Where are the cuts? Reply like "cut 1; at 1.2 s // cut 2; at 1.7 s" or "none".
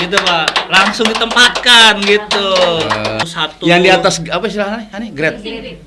cut 1; at 3.2 s